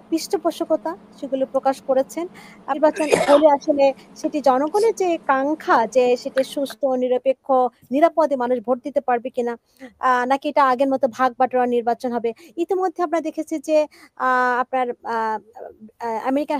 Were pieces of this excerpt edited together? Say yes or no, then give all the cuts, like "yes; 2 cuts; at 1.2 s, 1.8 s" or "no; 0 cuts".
yes; 1 cut; at 2.8 s